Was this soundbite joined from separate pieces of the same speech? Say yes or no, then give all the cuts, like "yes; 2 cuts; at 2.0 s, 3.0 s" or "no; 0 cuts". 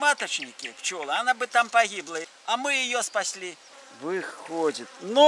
yes; 2 cuts; at 2.3 s, 3.6 s